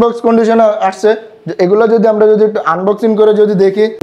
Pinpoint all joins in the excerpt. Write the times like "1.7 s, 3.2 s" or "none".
none